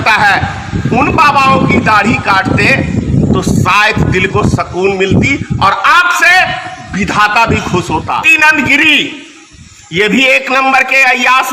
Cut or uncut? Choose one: cut